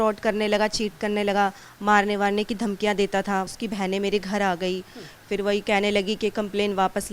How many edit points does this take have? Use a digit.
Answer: 2